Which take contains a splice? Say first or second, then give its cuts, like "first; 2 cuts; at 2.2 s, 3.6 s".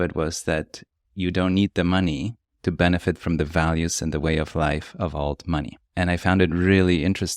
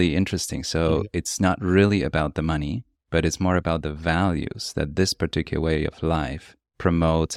first; 1 cut; at 5.8 s